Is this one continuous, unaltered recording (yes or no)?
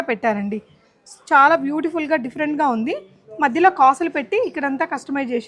yes